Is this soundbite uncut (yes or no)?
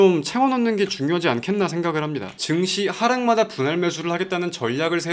no